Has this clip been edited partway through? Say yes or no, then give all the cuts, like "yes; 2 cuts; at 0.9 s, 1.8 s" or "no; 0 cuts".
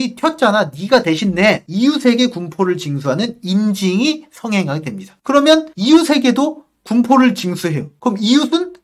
no; 0 cuts